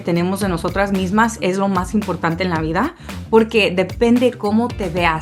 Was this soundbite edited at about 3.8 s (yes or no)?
no